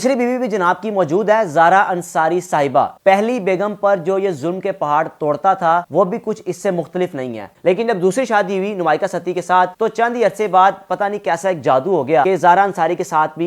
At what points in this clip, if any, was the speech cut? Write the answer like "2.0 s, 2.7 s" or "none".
2.9 s, 7.6 s